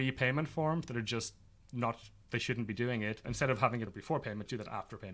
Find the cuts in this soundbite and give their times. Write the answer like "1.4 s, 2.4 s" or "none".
3.3 s, 4.0 s

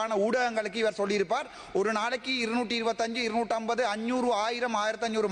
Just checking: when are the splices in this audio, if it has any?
none

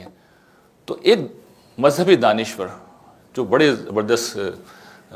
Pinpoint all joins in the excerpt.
none

